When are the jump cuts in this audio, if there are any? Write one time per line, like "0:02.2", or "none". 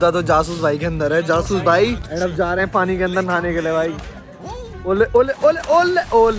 0:02.0